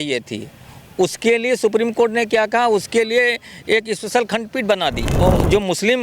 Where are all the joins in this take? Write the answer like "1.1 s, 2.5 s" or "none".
5.1 s

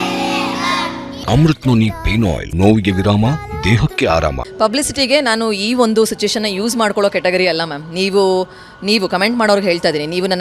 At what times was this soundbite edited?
1.2 s, 2.4 s, 4.5 s

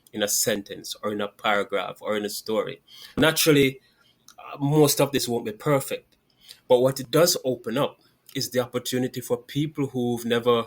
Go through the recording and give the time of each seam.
3.2 s

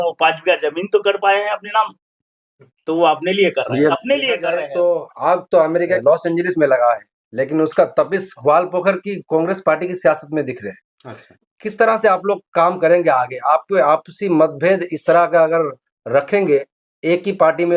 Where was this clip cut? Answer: 3.9 s

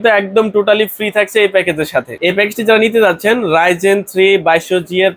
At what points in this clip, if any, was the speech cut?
none

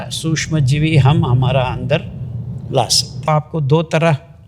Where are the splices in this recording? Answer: 3.3 s

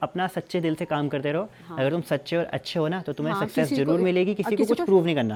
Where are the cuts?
none

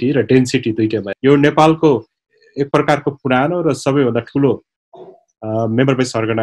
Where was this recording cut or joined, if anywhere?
1.1 s

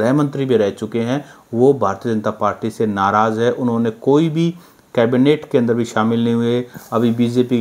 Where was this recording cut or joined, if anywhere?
none

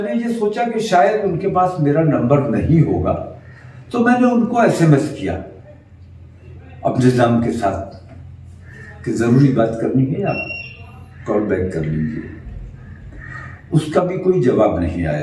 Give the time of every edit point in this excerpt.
none

